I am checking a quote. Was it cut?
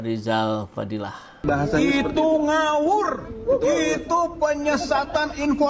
yes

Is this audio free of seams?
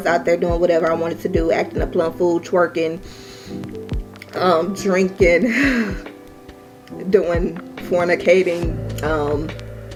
yes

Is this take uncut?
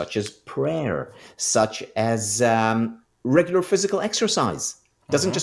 yes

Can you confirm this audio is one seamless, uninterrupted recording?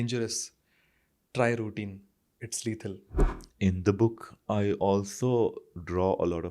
no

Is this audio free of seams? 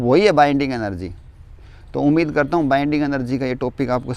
yes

